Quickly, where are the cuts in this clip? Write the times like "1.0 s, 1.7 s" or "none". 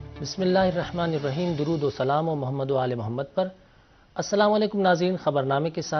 2.8 s